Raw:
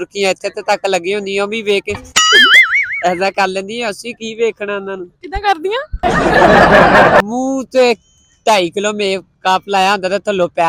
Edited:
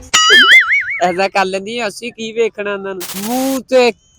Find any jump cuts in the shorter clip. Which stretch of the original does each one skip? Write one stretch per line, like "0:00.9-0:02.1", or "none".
0:05.3-0:07.3